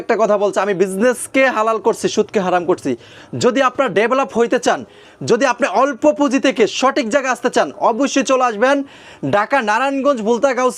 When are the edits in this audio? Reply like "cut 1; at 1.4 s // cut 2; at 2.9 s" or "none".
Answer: none